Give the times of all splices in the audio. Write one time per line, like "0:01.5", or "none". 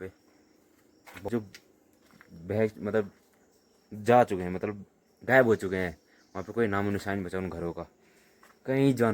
0:01.3